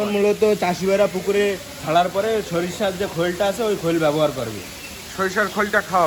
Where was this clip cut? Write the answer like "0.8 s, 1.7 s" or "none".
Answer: none